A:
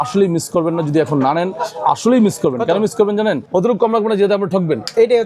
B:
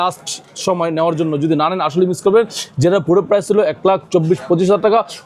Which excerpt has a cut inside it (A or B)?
A